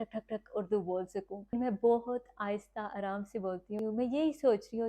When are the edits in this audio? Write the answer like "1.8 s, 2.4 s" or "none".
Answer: 1.5 s, 3.8 s